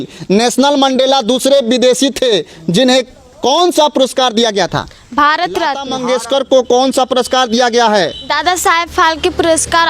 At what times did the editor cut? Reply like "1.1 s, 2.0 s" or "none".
5.9 s